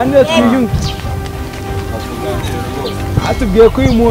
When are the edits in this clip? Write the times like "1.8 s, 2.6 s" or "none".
none